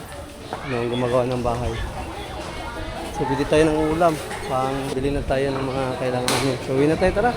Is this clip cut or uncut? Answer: cut